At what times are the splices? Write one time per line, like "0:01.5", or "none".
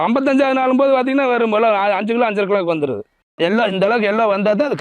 0:03.1